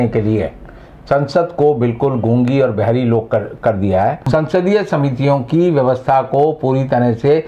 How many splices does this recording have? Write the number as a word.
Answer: one